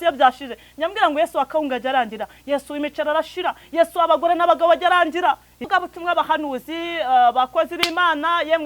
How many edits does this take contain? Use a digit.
1